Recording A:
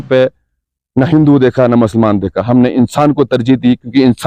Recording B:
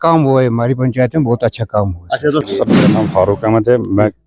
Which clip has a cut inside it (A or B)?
B